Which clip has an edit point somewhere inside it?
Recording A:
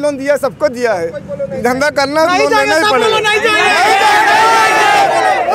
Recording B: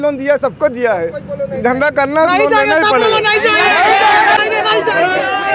B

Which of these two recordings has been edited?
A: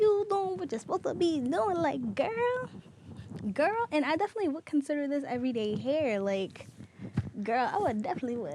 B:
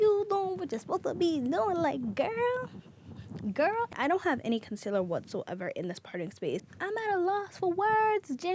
B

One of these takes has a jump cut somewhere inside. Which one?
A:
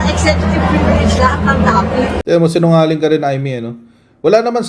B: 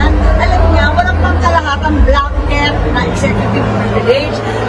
A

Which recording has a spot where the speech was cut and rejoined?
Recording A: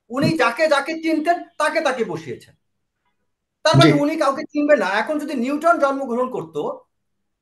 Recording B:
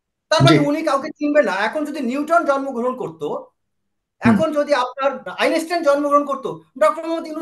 B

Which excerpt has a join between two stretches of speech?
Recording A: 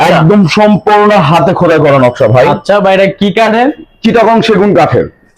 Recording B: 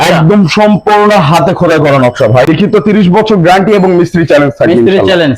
B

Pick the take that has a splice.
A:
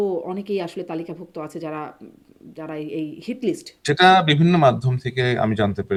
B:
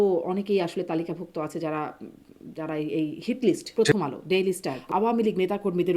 B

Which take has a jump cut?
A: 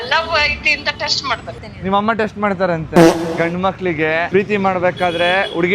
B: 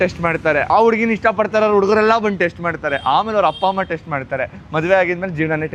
A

